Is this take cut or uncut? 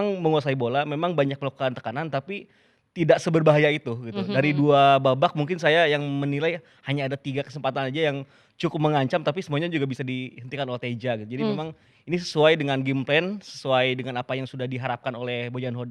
uncut